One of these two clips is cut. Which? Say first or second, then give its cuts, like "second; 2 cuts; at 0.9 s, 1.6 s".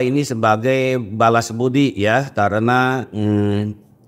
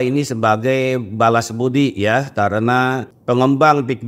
second; 1 cut; at 3.1 s